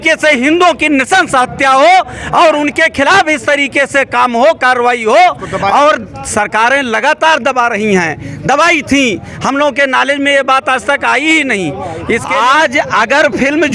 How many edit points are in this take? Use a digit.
1